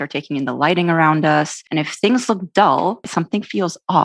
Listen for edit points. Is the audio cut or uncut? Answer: cut